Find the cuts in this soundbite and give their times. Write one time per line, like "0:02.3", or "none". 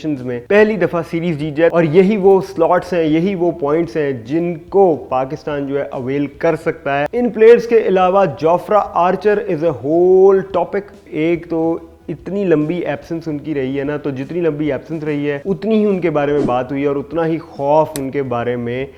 0:01.7
0:07.1
0:11.0